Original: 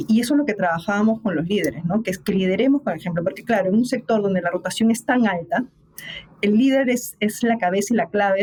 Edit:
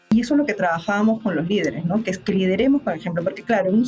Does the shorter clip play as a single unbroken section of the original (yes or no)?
yes